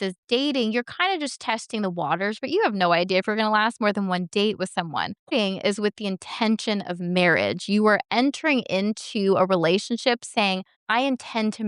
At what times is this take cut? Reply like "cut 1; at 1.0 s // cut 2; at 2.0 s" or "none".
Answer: cut 1; at 5.3 s // cut 2; at 10.7 s